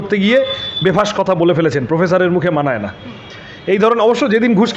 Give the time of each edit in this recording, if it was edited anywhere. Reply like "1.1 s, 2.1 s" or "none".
none